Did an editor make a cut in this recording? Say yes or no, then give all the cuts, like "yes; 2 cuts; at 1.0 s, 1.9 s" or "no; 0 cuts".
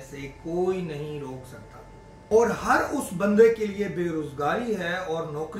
yes; 1 cut; at 2.1 s